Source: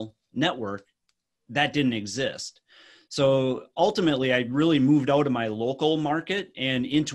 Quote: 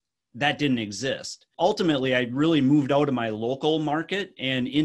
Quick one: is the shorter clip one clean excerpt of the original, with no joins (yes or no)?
no